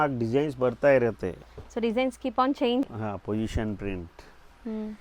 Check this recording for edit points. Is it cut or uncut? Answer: cut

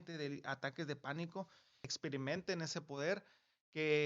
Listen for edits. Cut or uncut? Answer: cut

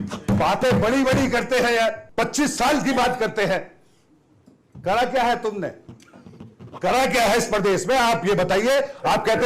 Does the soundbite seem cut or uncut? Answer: cut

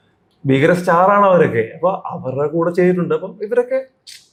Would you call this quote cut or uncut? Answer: uncut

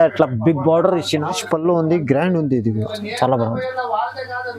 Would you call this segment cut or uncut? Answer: cut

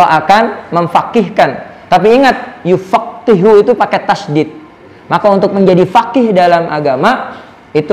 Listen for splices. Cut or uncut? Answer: uncut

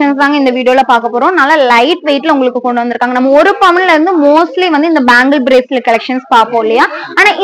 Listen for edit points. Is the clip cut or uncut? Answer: uncut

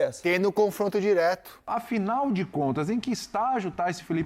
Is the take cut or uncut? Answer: cut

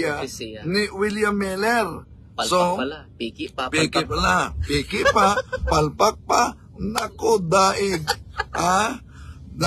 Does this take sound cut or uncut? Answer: uncut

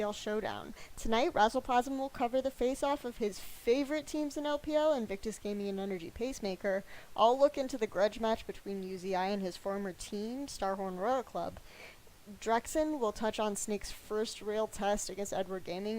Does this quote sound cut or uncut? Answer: cut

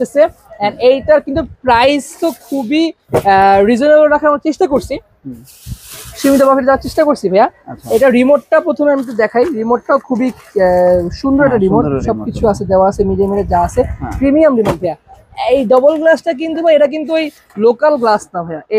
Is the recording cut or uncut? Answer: uncut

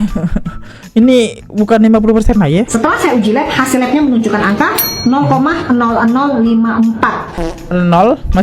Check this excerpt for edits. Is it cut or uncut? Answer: cut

